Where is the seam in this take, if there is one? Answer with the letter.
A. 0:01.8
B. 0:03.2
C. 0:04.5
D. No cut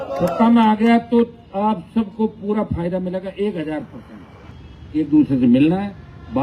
C